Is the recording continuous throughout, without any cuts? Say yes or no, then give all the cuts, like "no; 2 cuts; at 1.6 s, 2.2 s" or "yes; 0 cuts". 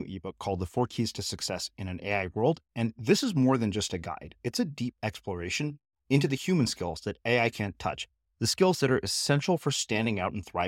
yes; 0 cuts